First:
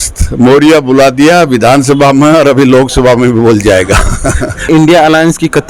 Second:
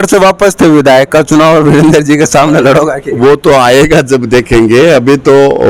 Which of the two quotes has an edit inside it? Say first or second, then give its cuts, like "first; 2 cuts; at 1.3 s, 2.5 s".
first; 1 cut; at 4.7 s